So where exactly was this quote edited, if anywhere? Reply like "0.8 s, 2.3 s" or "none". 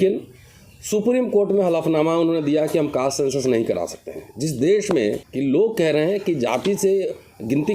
5.3 s